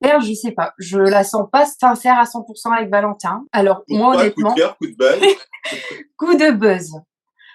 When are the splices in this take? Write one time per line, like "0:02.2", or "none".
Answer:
0:03.5